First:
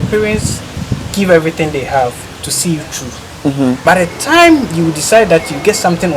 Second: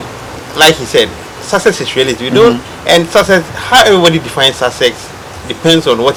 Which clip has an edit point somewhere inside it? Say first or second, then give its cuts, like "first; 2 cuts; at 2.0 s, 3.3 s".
first; 1 cut; at 3.8 s